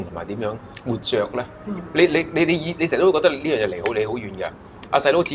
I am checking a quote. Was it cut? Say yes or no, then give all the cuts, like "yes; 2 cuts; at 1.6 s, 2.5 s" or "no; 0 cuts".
no; 0 cuts